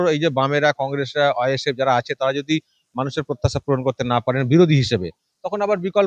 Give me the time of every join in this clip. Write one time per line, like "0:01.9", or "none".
none